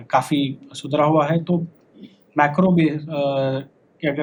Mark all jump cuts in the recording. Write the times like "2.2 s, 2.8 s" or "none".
none